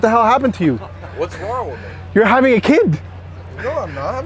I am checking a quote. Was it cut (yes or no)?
no